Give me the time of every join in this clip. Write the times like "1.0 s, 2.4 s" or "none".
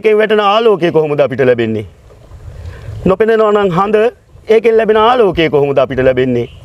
none